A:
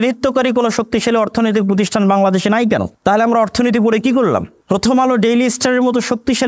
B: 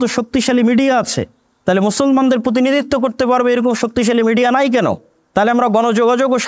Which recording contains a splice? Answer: A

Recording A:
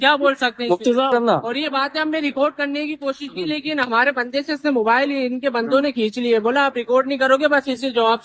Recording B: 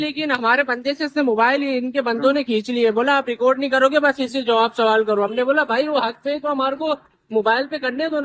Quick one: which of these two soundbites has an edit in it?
A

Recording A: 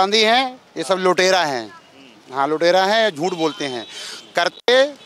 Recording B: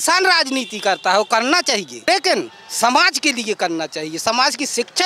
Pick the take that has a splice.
B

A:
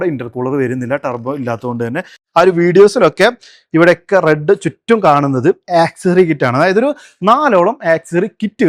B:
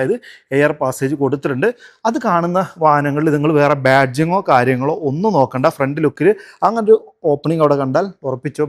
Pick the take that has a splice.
A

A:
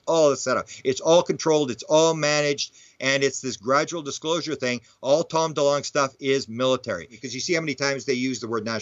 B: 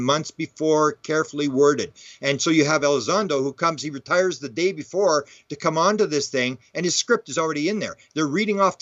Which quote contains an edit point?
A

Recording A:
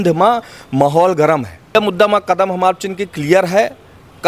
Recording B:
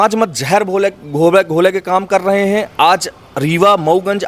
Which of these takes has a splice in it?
A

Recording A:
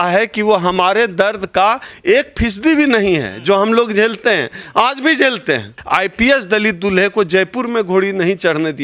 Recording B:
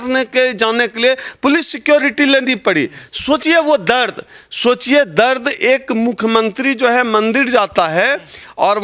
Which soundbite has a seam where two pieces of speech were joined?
A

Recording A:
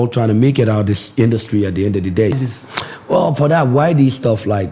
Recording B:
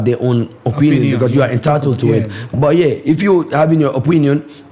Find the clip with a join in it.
A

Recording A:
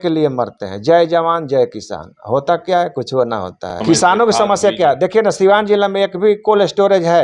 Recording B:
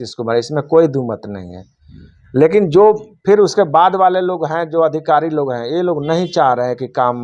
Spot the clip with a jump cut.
A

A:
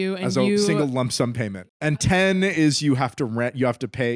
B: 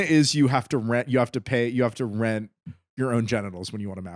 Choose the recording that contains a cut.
A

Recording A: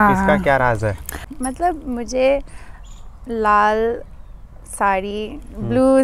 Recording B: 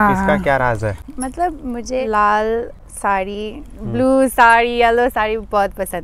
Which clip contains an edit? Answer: B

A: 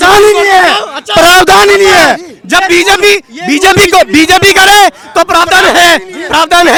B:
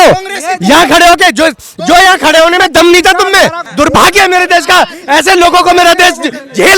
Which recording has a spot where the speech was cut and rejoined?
B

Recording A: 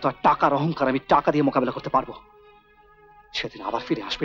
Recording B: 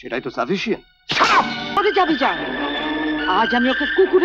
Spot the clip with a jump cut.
B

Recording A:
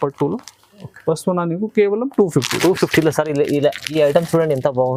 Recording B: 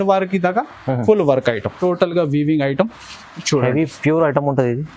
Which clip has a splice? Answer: B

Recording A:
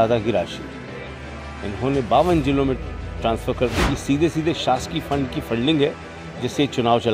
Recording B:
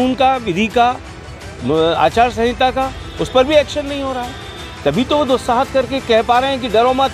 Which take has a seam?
A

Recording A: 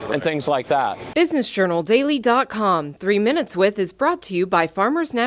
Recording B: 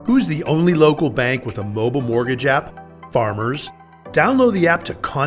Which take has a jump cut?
A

